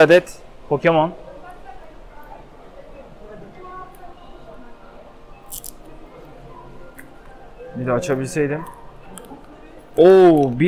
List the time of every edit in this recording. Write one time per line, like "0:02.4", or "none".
none